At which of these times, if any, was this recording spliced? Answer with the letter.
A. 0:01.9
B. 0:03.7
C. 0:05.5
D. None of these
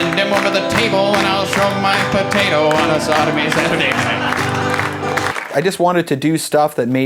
C